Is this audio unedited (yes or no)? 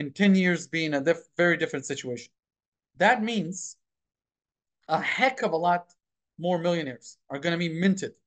no